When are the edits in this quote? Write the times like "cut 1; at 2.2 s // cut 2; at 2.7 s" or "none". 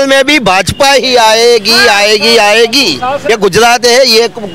cut 1; at 3.3 s